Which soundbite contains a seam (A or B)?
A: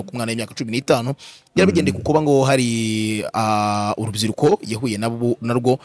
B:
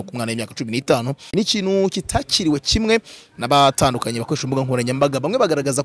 B